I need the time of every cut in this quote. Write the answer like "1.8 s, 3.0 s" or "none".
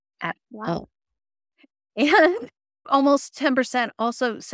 2.8 s